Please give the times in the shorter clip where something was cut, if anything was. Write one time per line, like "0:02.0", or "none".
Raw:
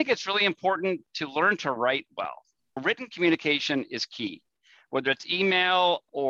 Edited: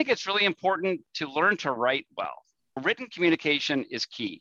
none